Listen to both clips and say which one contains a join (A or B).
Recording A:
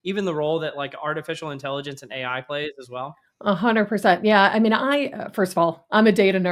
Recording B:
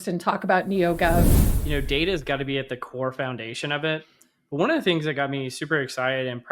B